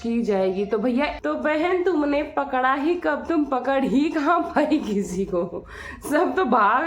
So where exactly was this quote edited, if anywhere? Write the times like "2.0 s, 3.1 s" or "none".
1.2 s